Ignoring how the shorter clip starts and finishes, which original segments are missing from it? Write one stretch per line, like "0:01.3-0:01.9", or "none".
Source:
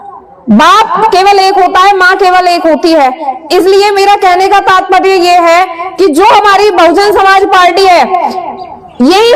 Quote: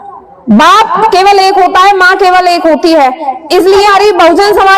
0:03.9-0:06.5